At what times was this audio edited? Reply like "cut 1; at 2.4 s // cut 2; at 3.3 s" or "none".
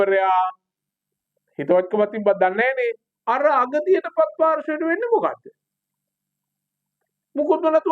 cut 1; at 3.1 s